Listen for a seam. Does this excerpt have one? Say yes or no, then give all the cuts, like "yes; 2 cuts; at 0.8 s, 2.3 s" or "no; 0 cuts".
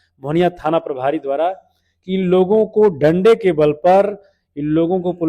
no; 0 cuts